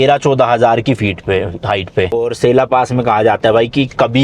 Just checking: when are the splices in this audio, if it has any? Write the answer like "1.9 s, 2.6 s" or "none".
2.1 s